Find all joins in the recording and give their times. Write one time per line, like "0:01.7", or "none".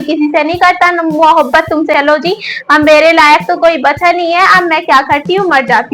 0:01.9